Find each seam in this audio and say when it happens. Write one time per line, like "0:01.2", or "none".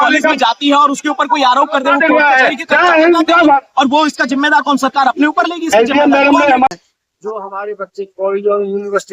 0:06.7